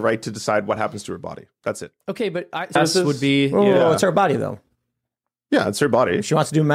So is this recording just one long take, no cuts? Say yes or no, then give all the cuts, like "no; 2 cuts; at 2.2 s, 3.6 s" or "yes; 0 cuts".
no; 1 cut; at 2.8 s